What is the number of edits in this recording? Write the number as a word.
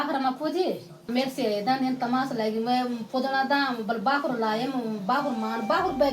one